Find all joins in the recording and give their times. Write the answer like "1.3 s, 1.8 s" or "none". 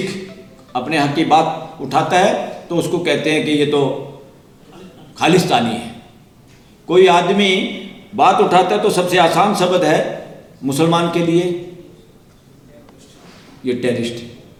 none